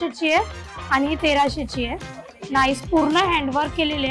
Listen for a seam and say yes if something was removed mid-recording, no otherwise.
no